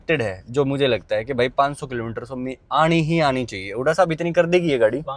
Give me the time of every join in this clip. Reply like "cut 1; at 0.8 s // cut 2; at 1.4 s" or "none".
none